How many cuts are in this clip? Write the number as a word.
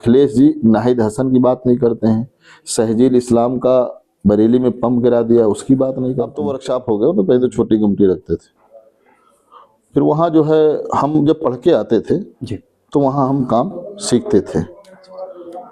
one